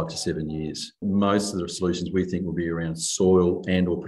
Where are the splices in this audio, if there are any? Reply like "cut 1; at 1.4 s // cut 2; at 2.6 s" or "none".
cut 1; at 1.0 s